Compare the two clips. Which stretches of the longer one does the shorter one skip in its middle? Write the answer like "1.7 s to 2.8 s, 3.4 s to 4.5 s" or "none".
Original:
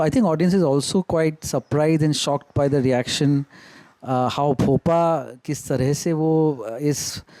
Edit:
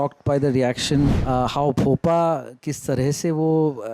3.5 s to 4.0 s